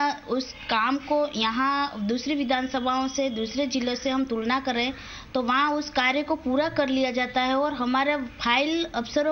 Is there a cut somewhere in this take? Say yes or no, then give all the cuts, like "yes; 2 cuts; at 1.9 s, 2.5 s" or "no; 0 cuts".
no; 0 cuts